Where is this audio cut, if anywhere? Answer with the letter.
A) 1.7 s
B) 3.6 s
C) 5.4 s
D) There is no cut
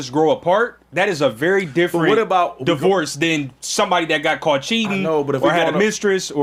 D